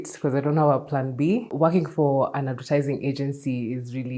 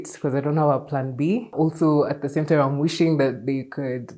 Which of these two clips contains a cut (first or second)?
first